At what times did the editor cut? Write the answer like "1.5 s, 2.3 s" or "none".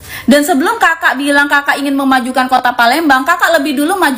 none